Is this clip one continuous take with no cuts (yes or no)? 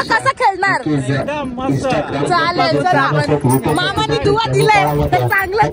yes